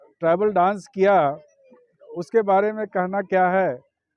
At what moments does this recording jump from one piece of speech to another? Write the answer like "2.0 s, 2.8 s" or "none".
none